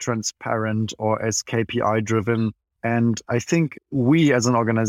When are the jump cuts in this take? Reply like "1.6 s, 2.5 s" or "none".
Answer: 2.7 s, 3.8 s

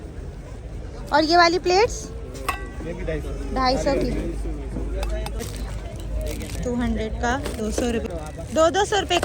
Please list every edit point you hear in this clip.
5.4 s, 8.0 s

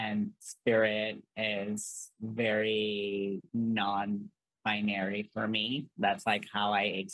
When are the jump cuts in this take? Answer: 3.4 s

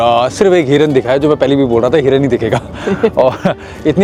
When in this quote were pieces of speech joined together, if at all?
none

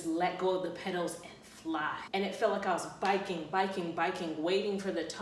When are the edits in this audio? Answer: 2.0 s

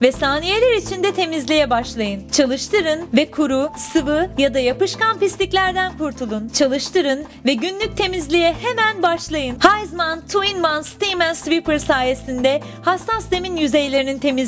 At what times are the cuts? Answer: 2.2 s, 9.5 s

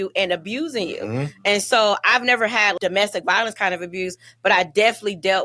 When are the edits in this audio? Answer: 2.8 s

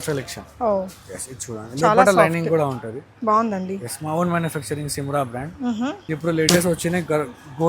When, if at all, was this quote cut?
6.0 s

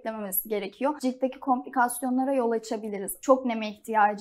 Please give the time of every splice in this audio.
1.0 s, 3.1 s

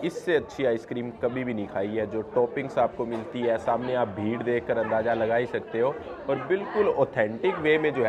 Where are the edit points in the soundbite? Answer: none

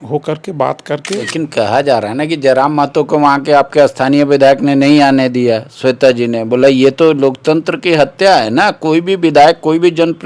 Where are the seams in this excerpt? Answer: 1.2 s

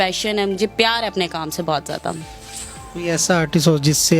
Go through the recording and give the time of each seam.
none

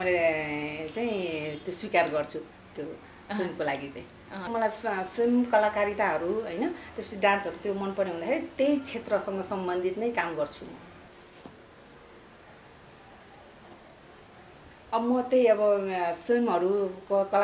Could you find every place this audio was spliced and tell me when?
4.5 s, 11.1 s

